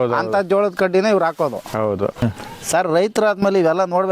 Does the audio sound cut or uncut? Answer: cut